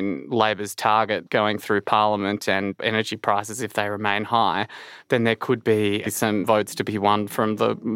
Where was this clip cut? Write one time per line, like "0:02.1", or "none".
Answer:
0:02.8
0:06.4